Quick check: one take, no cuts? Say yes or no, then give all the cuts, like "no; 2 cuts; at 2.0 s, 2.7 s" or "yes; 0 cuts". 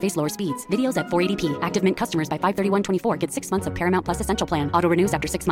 yes; 0 cuts